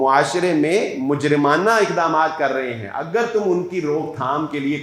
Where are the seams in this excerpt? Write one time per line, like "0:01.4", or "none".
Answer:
none